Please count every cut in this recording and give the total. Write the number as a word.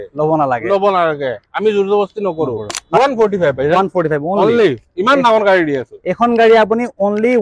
one